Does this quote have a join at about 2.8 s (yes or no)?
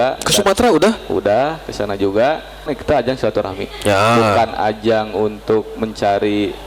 yes